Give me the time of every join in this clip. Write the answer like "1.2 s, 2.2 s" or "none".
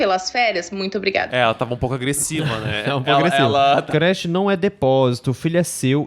1.3 s, 3.9 s